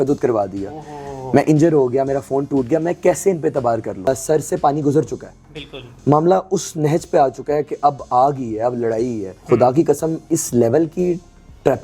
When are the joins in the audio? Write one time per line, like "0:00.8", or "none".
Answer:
0:04.1
0:09.3